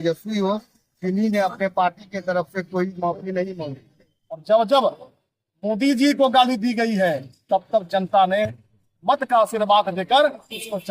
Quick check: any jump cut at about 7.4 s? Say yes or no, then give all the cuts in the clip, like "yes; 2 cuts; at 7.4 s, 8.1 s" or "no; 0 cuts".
no; 1 cut; at 4.4 s